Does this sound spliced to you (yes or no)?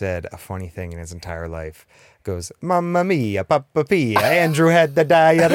no